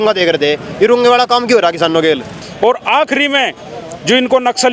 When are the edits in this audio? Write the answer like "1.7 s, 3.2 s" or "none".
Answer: 2.4 s